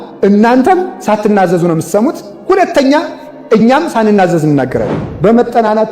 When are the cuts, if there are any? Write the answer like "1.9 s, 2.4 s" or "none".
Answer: 0.9 s, 2.3 s, 5.0 s